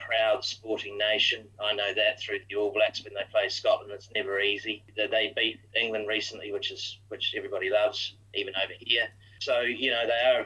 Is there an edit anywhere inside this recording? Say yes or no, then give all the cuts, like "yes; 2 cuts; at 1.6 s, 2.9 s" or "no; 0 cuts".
yes; 3 cuts; at 4.8 s, 8.1 s, 9.4 s